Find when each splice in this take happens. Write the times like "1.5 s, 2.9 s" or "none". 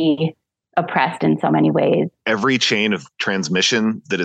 2.2 s